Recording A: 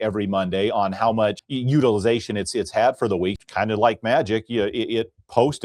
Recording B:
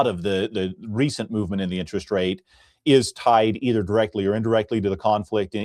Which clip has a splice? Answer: A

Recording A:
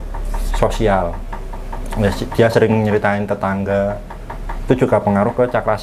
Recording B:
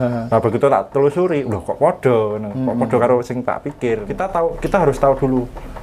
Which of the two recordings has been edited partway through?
B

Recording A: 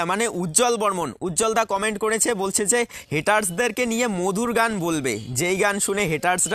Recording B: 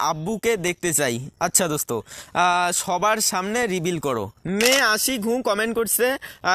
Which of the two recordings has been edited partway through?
B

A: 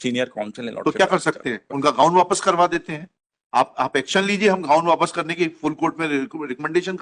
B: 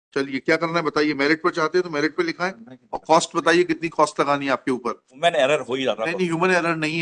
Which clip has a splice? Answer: B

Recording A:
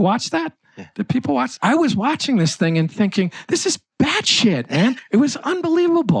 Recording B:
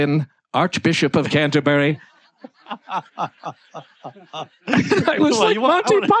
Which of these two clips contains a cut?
A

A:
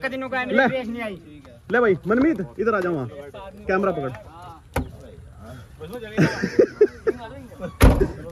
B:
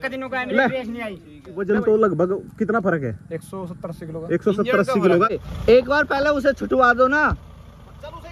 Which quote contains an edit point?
B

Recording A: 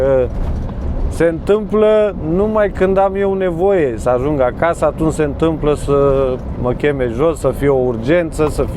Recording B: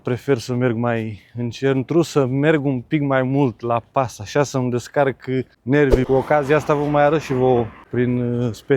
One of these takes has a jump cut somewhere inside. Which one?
B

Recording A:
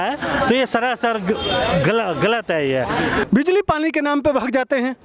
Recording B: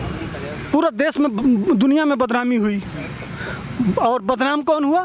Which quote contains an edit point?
A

